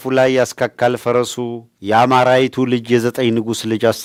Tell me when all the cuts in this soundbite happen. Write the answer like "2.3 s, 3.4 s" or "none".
none